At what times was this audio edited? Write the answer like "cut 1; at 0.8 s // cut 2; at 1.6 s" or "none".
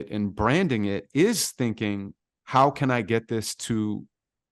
none